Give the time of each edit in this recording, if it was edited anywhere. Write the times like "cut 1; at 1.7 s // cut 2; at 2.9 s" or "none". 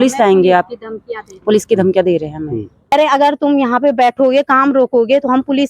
cut 1; at 2.9 s

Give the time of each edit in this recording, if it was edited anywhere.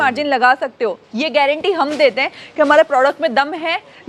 none

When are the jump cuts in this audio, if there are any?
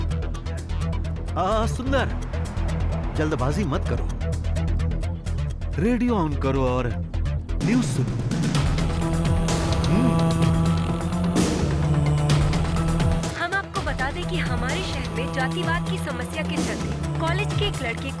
cut 1; at 13.2 s

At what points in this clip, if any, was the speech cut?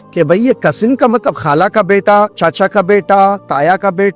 cut 1; at 2.3 s

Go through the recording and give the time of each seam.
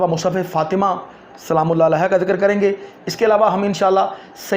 none

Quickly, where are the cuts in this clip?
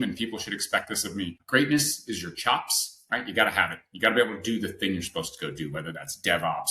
cut 1; at 1.4 s

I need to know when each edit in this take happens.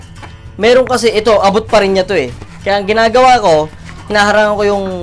none

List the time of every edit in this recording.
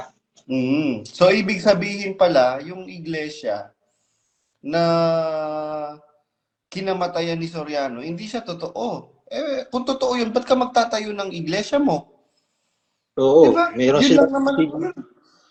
none

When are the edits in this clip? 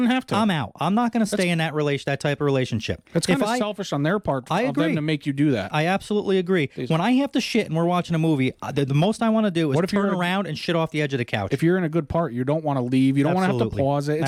none

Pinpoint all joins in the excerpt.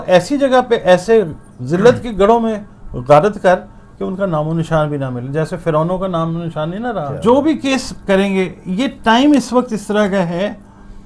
cut 1; at 7.1 s

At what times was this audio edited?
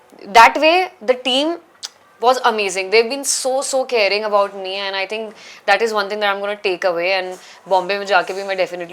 none

